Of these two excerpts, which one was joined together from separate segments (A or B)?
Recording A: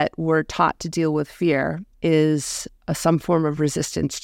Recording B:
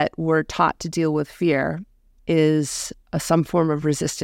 A